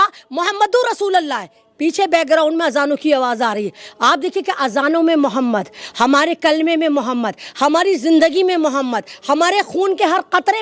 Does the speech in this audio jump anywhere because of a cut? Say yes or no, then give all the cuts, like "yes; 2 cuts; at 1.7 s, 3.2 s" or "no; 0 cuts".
no; 0 cuts